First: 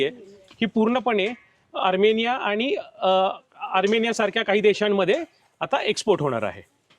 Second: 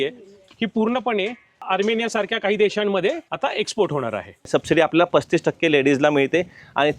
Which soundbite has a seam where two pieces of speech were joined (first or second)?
second